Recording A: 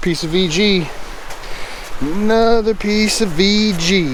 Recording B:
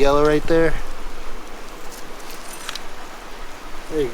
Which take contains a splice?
B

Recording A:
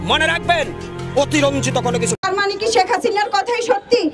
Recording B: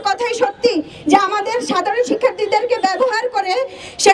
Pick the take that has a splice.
A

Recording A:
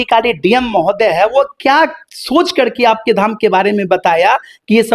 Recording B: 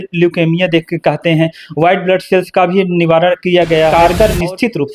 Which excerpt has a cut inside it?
B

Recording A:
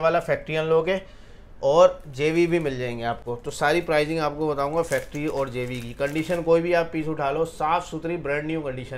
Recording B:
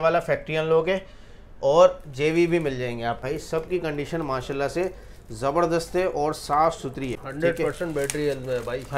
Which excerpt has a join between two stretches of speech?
B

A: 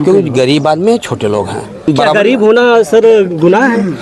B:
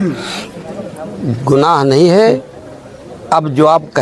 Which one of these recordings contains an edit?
A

